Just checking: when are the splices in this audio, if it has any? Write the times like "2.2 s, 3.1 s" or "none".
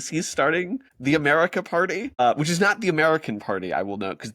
0.9 s, 2.2 s